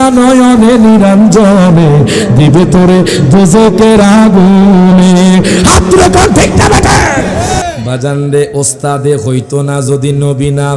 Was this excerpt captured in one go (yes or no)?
no